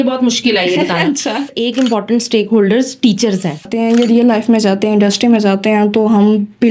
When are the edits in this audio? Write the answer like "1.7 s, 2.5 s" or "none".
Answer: 1.5 s, 3.7 s